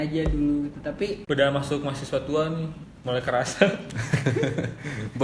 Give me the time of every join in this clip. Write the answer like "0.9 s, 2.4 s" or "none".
1.2 s